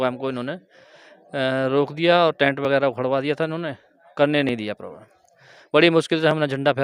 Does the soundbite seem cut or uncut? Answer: uncut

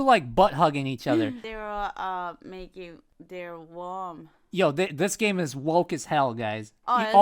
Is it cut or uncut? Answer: cut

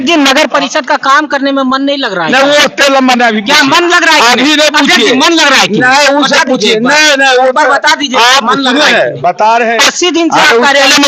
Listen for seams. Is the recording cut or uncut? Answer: uncut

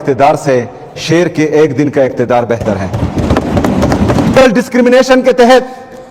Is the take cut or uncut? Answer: cut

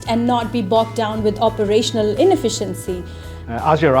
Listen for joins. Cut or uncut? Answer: cut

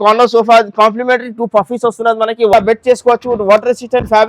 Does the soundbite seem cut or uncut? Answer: cut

